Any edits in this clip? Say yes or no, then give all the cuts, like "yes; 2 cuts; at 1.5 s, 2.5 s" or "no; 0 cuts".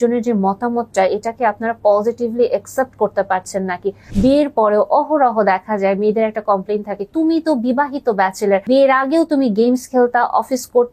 yes; 2 cuts; at 4.0 s, 8.6 s